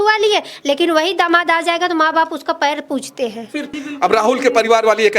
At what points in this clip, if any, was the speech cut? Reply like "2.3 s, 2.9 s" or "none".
3.8 s